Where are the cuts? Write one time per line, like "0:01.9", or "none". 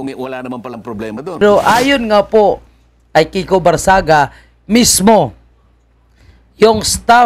0:01.4